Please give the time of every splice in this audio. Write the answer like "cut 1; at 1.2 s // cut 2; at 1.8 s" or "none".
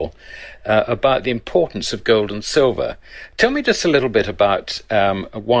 cut 1; at 1.2 s